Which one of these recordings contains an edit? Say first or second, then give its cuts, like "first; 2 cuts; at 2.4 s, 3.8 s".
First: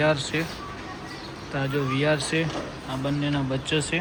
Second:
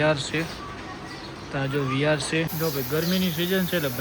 second; 1 cut; at 2.5 s